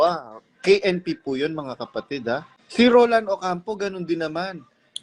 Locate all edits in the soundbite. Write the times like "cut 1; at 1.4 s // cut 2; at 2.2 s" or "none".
cut 1; at 2.6 s